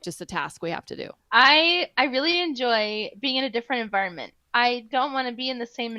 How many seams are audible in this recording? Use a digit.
1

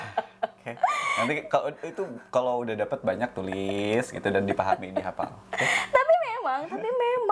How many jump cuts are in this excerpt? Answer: 0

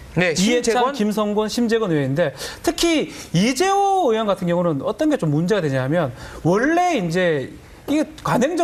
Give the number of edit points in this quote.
0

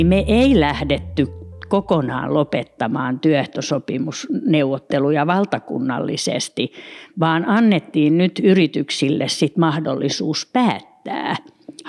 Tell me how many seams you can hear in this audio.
0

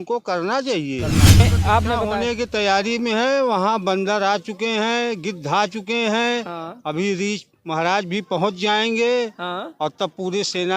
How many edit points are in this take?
1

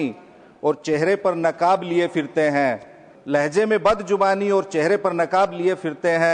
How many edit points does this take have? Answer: 0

